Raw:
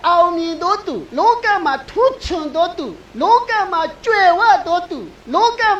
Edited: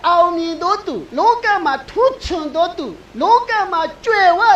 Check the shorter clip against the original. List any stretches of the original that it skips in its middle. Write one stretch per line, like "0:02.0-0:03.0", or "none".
none